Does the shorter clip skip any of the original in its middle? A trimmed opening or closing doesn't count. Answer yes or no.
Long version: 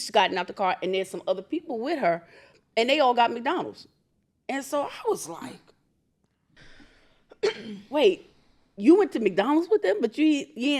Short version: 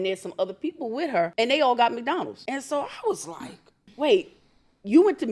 yes